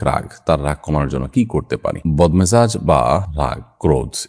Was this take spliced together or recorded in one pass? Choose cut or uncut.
uncut